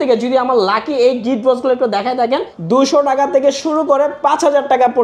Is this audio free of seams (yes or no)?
no